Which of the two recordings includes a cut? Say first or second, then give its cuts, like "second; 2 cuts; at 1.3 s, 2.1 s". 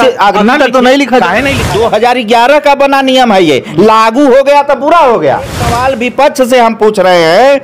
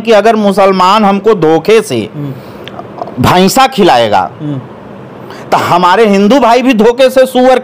first; 2 cuts; at 1.6 s, 5.8 s